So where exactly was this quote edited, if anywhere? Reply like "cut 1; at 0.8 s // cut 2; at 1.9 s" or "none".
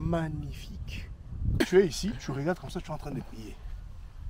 cut 1; at 1.6 s

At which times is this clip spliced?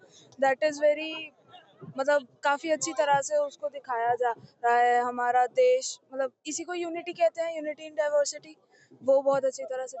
none

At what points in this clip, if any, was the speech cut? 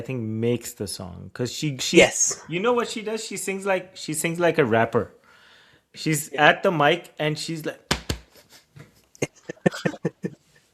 none

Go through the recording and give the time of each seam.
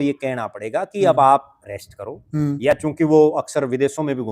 none

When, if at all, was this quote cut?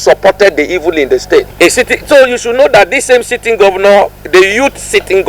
cut 1; at 1.5 s

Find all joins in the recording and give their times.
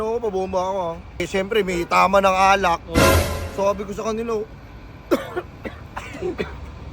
cut 1; at 1.2 s

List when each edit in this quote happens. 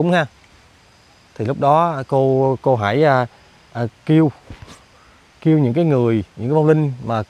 none

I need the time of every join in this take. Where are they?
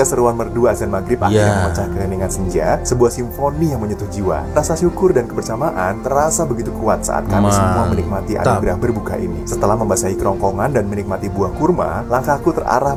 none

